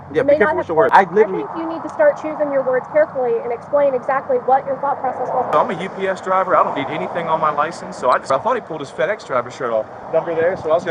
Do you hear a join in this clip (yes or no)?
yes